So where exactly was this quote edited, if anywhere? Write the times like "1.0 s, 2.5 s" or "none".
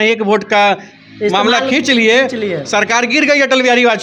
none